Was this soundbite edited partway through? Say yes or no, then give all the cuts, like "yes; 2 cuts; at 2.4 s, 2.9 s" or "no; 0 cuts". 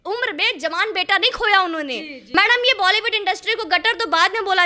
yes; 1 cut; at 2.2 s